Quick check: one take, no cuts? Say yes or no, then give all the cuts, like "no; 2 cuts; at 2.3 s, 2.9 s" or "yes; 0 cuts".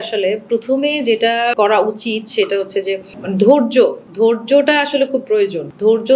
no; 2 cuts; at 1.5 s, 3.1 s